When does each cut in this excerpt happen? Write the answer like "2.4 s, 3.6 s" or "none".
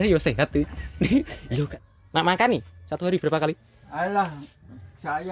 1.7 s